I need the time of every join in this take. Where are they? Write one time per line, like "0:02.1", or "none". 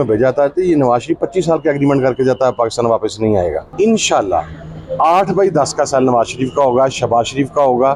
0:03.6